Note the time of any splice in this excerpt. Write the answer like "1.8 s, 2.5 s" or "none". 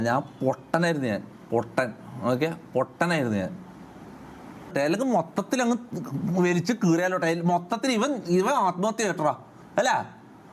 4.7 s